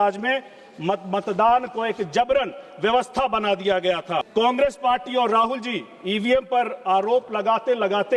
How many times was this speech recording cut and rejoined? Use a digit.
1